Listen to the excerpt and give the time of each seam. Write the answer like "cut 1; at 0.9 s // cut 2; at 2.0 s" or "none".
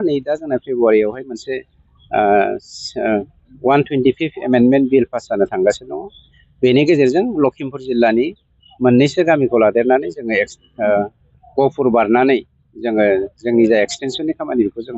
none

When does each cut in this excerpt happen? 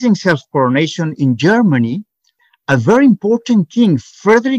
cut 1; at 2.5 s

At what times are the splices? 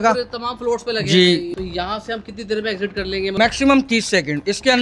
cut 1; at 1.5 s // cut 2; at 3.3 s

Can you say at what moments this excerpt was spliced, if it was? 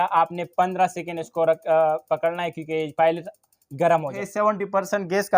cut 1; at 4.2 s

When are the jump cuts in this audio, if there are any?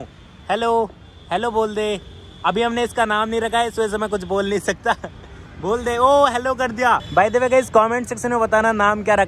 cut 1; at 7.0 s

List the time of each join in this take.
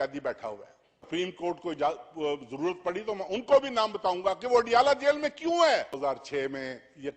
cut 1; at 1.0 s // cut 2; at 6.0 s

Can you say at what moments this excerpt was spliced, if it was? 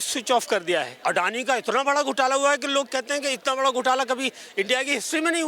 cut 1; at 0.9 s

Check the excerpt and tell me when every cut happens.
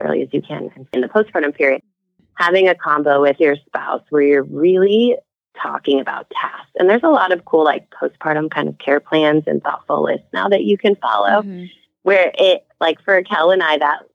cut 1; at 0.9 s

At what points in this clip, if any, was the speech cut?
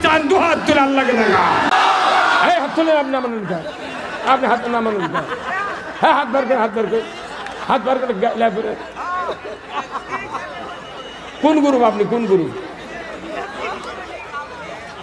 cut 1; at 1.7 s

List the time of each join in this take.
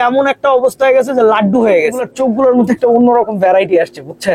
cut 1; at 2.1 s

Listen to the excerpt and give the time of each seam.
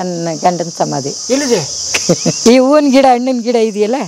cut 1; at 2.4 s

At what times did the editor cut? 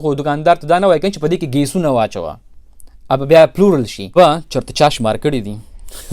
cut 1; at 4.0 s

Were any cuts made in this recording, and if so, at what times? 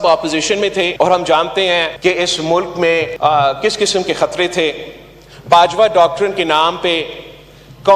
cut 1; at 0.9 s // cut 2; at 1.9 s // cut 3; at 3.1 s

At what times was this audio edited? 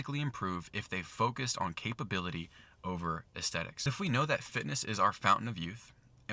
cut 1; at 3.9 s

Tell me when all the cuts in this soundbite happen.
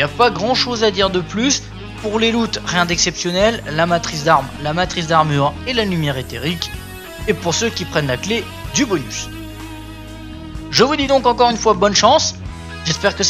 cut 1; at 1.4 s

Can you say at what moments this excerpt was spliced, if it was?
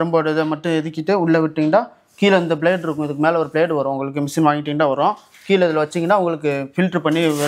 none

